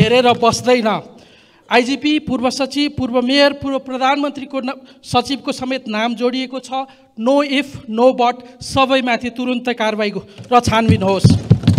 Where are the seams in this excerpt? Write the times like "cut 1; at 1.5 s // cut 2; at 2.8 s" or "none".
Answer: none